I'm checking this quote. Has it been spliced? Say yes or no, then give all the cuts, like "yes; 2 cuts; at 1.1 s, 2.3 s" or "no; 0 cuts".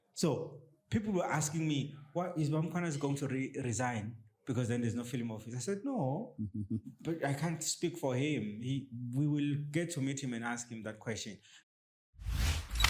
yes; 1 cut; at 11.6 s